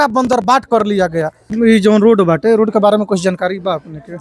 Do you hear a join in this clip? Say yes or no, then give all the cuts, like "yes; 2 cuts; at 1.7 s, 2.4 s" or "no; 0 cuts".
yes; 1 cut; at 1.4 s